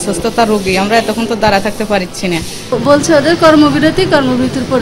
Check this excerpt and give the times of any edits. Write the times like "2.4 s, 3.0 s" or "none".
2.6 s